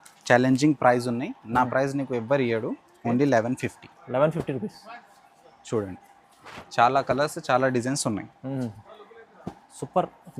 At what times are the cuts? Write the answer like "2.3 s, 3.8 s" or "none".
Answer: none